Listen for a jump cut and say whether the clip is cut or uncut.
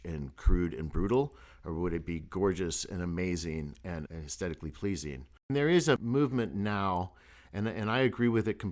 cut